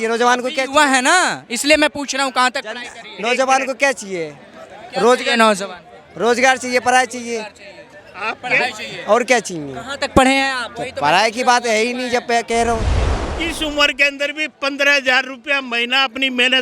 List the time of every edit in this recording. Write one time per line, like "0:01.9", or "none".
0:13.0